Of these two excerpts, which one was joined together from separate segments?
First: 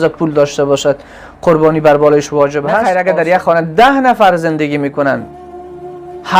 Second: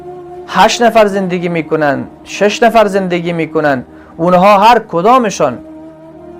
first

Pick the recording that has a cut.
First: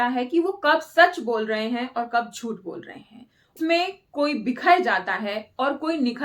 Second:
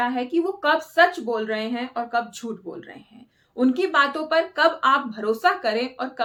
first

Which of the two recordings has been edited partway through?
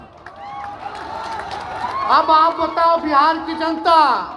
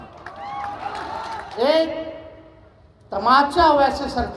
second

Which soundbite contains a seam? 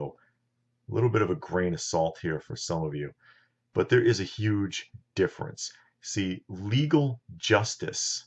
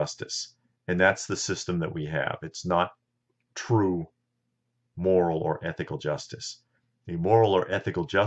second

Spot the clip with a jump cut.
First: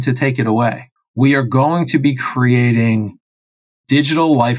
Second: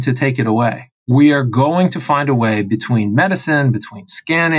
first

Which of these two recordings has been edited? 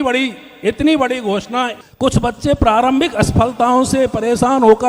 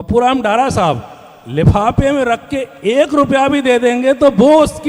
first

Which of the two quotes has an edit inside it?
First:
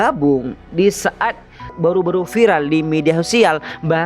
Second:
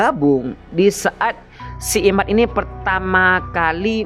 first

